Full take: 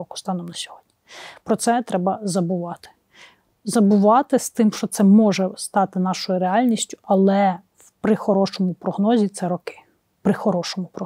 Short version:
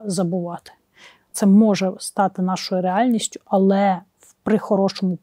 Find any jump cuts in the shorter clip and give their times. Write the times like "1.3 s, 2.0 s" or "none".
1.3 s